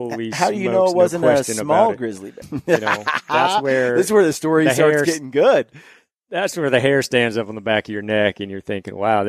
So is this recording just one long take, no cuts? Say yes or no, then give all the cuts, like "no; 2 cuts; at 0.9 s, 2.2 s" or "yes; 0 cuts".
no; 1 cut; at 2.3 s